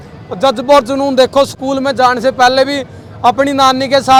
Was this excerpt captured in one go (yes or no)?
yes